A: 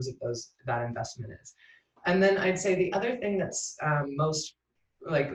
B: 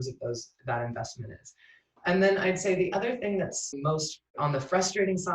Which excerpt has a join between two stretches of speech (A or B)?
B